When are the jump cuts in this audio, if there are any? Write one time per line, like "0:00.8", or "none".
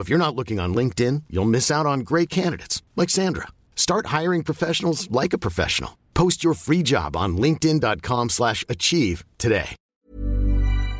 0:09.8